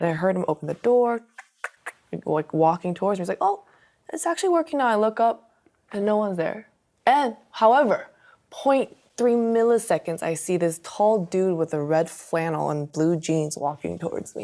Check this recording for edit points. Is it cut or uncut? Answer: uncut